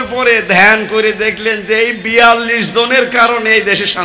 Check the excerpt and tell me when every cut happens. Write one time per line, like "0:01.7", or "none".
none